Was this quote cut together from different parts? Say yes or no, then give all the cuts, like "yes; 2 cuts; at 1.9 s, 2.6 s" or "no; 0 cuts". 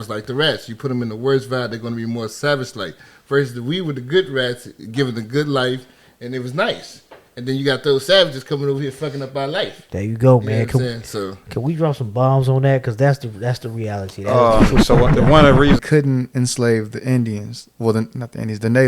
yes; 1 cut; at 15.8 s